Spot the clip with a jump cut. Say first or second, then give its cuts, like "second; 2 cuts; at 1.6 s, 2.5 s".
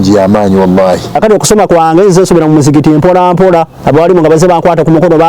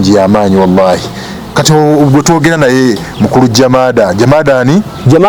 first; 1 cut; at 1.2 s